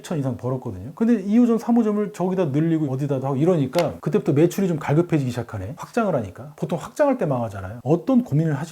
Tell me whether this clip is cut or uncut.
cut